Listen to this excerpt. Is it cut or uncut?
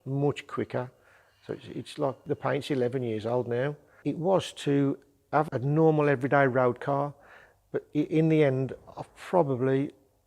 cut